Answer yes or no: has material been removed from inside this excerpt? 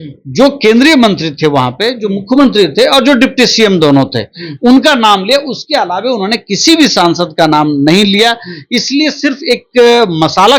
no